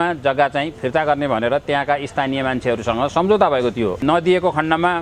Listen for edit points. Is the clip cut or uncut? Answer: cut